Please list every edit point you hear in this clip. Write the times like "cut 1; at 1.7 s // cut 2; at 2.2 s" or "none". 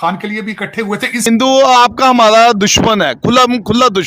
cut 1; at 1.3 s